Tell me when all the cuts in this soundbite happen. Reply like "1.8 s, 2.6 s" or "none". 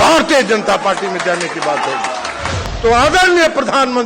2.7 s